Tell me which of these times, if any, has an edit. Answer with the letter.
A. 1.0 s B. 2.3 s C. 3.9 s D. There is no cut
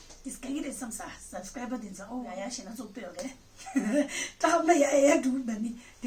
B